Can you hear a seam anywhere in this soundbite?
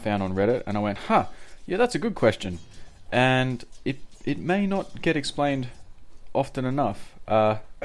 no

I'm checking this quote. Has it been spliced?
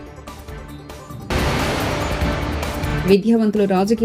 no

